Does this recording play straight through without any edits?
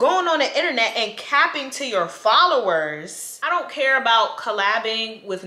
no; 1 cut; at 3.3 s

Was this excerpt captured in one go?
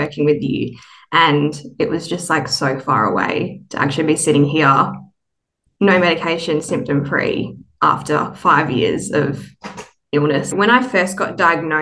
no; 1 cut; at 10.5 s

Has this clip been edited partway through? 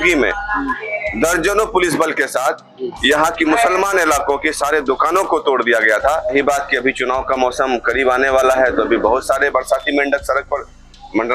yes; 1 cut; at 6.3 s

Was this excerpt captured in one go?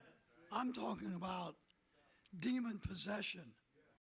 yes; 0 cuts

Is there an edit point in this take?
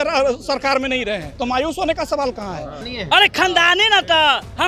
yes; 2 cuts; at 1.3 s, 2.9 s

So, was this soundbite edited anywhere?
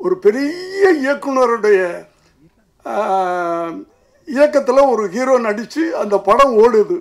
no; 0 cuts

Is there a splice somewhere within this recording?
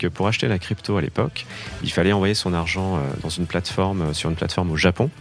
no; 0 cuts

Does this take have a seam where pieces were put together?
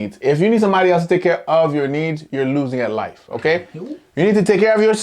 no; 0 cuts

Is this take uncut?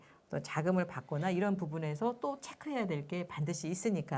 yes; 0 cuts

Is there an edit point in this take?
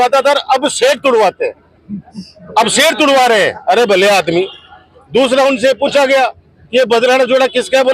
no; 0 cuts

